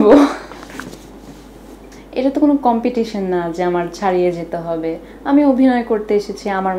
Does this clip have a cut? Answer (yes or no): no